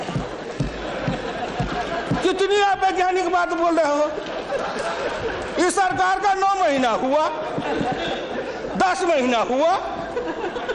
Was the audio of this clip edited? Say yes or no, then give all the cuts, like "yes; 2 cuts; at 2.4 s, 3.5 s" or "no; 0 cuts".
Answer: no; 0 cuts